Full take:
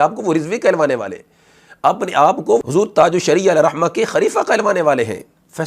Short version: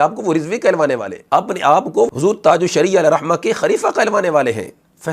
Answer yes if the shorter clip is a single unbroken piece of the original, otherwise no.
no